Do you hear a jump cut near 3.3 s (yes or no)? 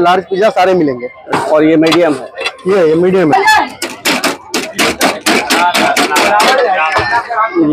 yes